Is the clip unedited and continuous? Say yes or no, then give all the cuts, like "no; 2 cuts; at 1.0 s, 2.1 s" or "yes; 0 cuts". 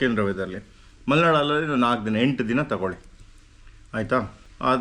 yes; 0 cuts